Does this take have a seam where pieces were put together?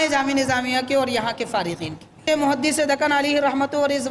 yes; 1 cut; at 2.2 s

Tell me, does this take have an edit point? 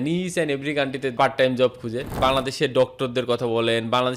yes; 1 cut; at 2.1 s

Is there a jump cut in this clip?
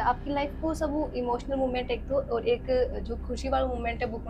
no; 0 cuts

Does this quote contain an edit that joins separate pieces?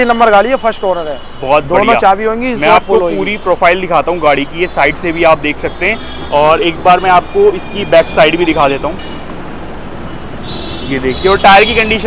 no; 0 cuts

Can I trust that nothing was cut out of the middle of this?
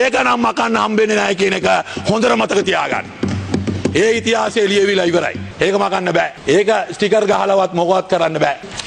yes; 0 cuts

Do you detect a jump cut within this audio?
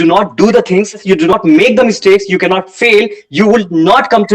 yes; 1 cut; at 1.3 s

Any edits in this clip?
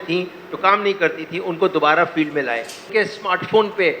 yes; 1 cut; at 2.9 s

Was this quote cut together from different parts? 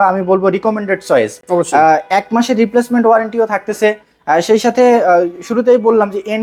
no; 0 cuts

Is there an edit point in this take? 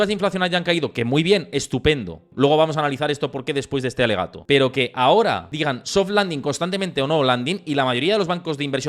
yes; 3 cuts; at 2.2 s, 4.4 s, 5.5 s

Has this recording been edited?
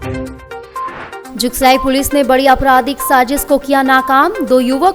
yes; 1 cut; at 1.3 s

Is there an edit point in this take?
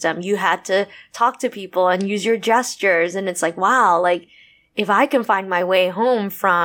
no; 0 cuts

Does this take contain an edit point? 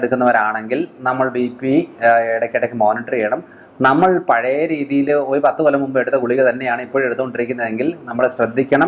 no; 0 cuts

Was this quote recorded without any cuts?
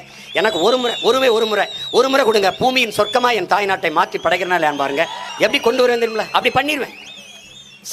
yes; 0 cuts

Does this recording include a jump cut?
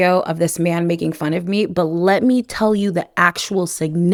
no; 0 cuts

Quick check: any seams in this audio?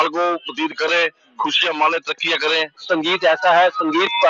yes; 1 cut; at 2.8 s

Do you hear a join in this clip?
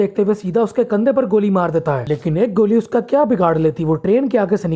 no; 0 cuts

